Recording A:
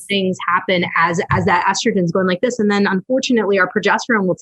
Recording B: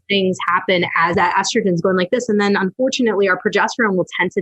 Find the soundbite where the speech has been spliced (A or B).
B